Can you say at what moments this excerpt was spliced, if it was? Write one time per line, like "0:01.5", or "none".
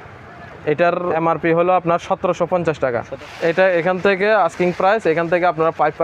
0:01.2
0:03.1